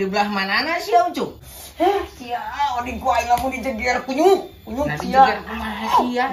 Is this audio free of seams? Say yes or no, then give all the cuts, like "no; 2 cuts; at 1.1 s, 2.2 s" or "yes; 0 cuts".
no; 1 cut; at 1.4 s